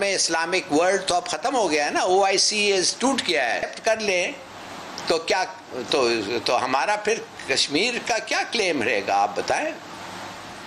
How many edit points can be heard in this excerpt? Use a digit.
1